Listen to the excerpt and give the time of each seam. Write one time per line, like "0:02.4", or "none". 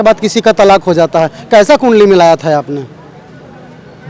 none